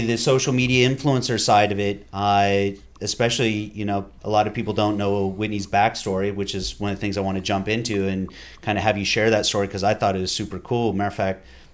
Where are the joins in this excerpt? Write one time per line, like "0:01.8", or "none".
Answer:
0:04.1

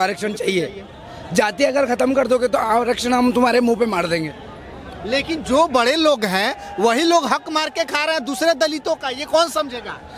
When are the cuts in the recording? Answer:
none

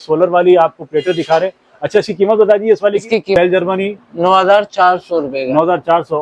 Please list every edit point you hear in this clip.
0:03.3

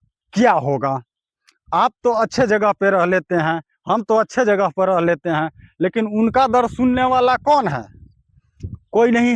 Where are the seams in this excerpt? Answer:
none

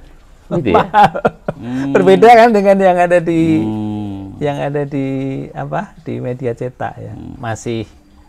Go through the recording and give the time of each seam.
0:07.4

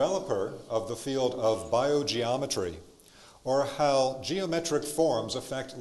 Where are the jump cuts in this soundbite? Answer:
0:04.2

